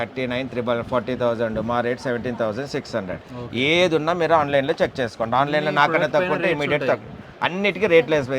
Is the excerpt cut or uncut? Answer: uncut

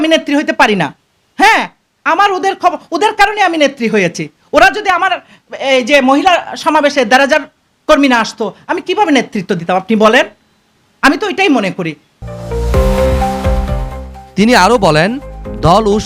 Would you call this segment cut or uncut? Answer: uncut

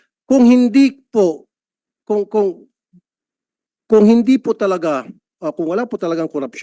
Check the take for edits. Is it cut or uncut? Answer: uncut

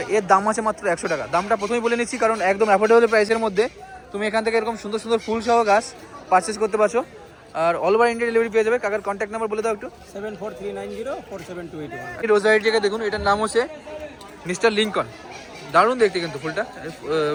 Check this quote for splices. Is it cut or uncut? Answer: uncut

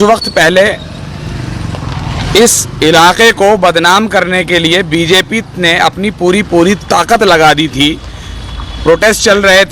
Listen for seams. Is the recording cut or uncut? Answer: cut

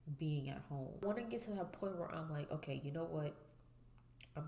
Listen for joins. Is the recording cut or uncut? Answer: cut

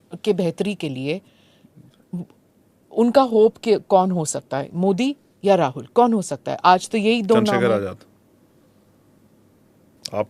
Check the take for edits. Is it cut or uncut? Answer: uncut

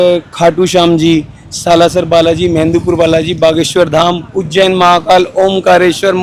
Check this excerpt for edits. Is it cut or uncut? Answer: uncut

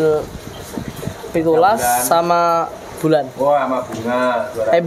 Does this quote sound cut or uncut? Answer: uncut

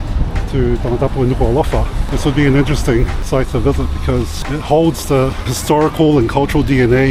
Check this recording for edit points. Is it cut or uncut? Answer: cut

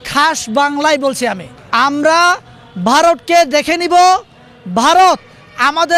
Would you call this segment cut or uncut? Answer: cut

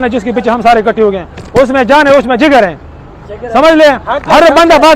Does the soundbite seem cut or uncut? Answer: uncut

